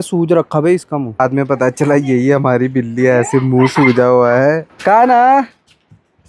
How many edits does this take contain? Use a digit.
2